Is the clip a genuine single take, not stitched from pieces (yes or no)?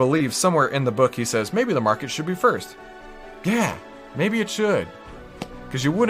yes